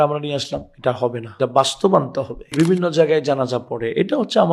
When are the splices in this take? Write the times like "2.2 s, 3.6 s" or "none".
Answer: 1.2 s, 2.5 s